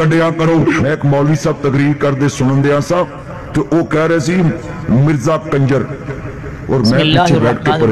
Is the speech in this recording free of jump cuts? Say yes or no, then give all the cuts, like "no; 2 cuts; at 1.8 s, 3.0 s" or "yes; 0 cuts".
yes; 0 cuts